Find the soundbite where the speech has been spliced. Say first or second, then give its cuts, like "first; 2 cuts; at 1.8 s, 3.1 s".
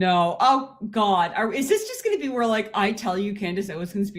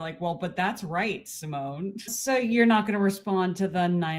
second; 1 cut; at 2.0 s